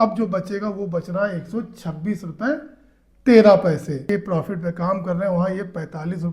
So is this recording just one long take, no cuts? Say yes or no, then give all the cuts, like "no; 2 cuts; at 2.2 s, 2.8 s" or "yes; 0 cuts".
no; 1 cut; at 4.0 s